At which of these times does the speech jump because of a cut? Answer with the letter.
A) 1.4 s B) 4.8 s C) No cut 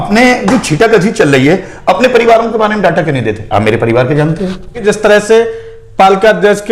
B